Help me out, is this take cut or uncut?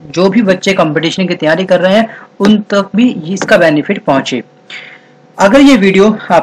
cut